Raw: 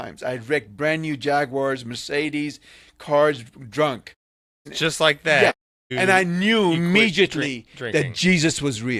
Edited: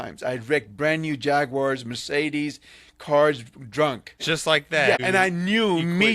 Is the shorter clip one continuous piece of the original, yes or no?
no